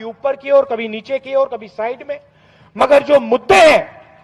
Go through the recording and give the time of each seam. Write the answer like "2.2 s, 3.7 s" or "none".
none